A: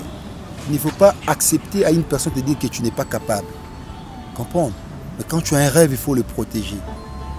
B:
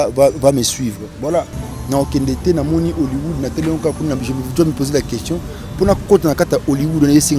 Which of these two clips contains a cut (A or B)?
B